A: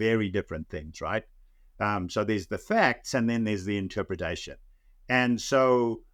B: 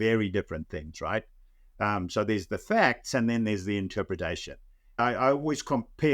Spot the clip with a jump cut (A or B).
B